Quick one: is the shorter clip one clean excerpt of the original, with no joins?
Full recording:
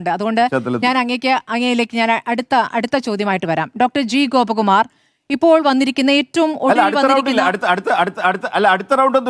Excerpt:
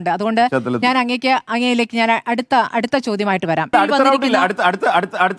no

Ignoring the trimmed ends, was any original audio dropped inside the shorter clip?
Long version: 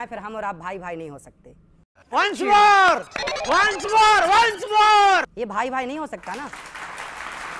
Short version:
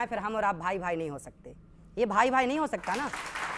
yes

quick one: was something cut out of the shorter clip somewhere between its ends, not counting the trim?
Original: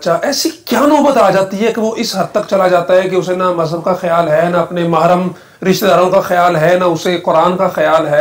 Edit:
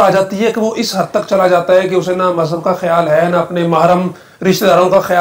no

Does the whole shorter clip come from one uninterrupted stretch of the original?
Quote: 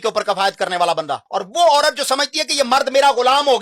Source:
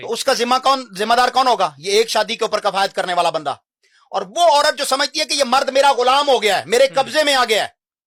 no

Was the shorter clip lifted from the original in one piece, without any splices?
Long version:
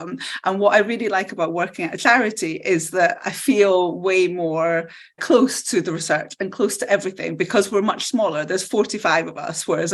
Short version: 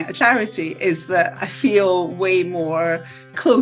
yes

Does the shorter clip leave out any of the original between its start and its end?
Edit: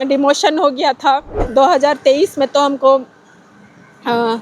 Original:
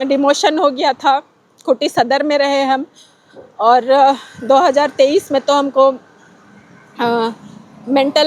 yes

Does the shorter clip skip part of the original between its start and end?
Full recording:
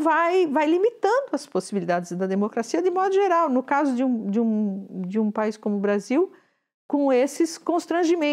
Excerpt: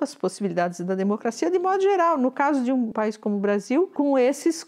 yes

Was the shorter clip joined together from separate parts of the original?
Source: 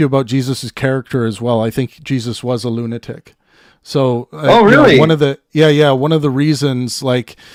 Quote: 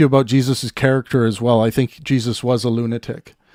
no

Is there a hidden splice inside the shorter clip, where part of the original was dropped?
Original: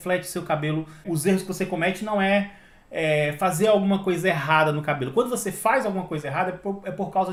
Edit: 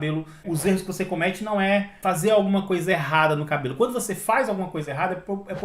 yes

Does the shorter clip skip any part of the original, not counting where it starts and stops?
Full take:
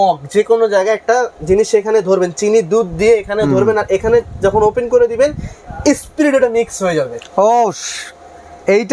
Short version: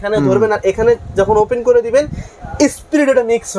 no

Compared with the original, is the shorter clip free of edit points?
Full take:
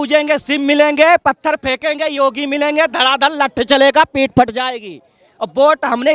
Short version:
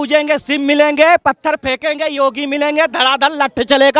yes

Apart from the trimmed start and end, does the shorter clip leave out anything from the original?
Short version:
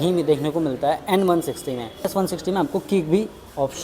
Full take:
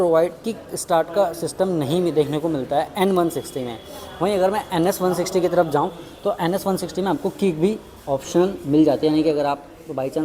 yes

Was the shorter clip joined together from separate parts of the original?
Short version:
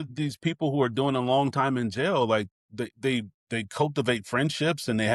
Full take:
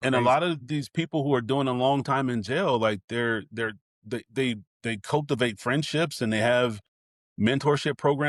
yes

